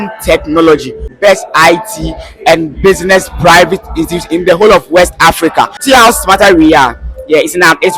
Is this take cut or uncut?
cut